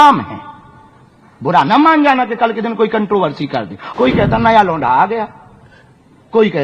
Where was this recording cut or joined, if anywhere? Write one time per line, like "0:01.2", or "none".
0:03.8